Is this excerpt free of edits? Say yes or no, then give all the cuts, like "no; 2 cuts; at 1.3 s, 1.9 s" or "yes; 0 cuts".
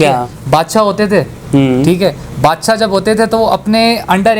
yes; 0 cuts